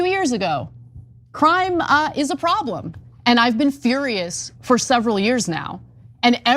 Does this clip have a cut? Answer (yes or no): yes